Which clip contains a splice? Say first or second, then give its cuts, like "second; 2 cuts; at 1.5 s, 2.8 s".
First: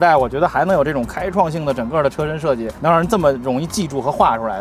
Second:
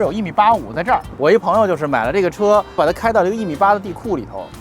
second; 2 cuts; at 1.1 s, 2.8 s